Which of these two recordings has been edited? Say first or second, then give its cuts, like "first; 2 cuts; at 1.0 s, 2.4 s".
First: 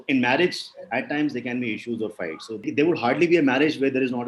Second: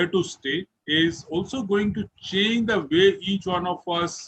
first; 1 cut; at 2.6 s